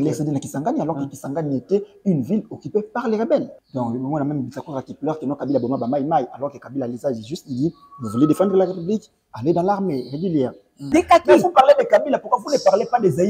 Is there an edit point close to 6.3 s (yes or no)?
no